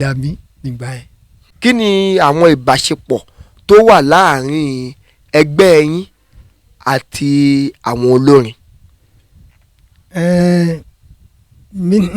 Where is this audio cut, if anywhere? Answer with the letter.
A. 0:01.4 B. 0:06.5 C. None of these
A